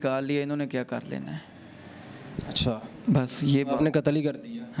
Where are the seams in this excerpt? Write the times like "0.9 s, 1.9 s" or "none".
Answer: none

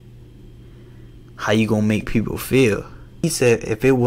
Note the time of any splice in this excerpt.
3.2 s

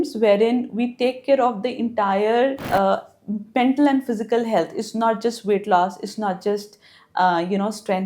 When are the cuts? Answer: 2.6 s

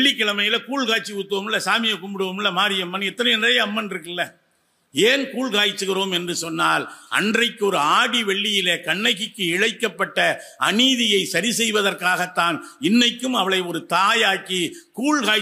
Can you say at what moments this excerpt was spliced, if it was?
none

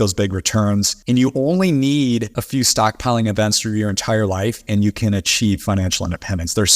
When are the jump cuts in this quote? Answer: 0.9 s, 2.4 s

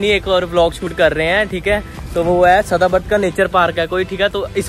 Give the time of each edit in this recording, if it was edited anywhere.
none

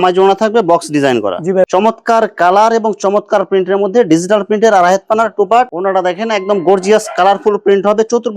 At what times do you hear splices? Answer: 1.7 s, 5.7 s

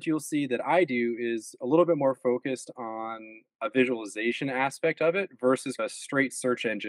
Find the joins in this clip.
none

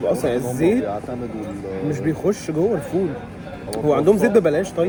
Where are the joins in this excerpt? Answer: none

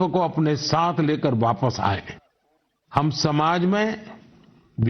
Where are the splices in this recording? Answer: none

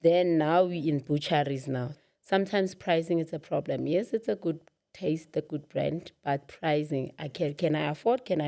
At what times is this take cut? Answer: 1.9 s

